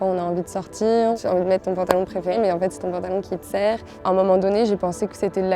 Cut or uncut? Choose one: cut